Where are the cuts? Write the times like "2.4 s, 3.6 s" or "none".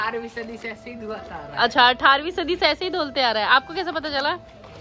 none